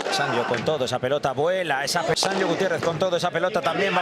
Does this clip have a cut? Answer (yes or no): no